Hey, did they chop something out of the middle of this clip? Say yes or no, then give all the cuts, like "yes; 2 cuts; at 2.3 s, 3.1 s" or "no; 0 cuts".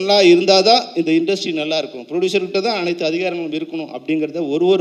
no; 0 cuts